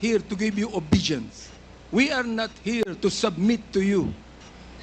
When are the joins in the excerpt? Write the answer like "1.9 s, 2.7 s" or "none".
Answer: none